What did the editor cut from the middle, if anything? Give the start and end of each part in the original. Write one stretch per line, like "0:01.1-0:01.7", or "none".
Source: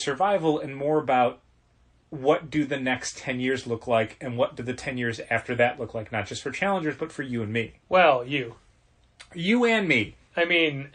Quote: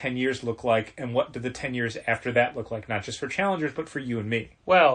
none